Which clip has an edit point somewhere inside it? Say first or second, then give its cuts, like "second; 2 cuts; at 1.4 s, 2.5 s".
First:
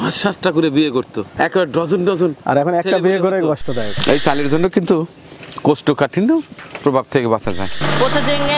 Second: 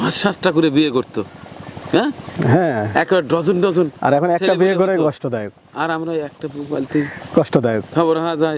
first; 3 cuts; at 1.3 s, 3.9 s, 7.8 s